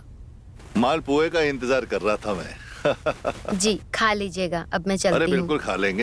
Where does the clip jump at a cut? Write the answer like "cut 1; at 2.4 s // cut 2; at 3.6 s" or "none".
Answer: none